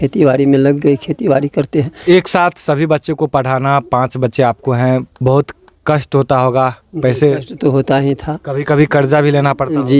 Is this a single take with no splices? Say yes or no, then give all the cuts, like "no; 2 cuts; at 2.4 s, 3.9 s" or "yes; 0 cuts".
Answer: no; 1 cut; at 1.9 s